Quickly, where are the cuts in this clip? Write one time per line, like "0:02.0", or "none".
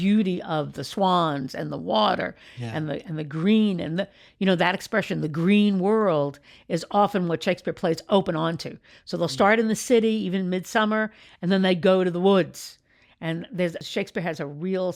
none